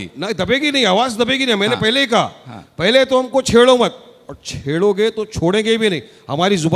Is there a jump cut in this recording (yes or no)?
no